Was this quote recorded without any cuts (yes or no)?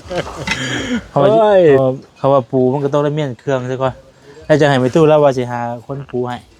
no